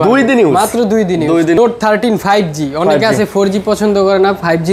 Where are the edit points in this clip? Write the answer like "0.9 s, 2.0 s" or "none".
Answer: 1.6 s

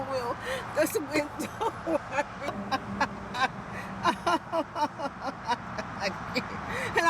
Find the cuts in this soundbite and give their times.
2.5 s

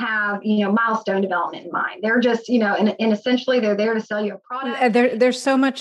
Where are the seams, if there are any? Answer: 4.5 s

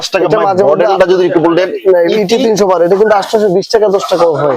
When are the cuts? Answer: none

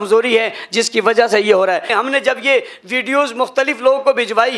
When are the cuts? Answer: 1.9 s

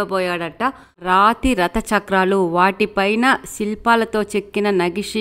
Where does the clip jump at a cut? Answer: 1.0 s

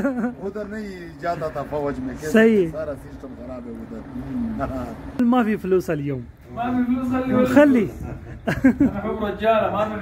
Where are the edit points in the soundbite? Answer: 5.2 s

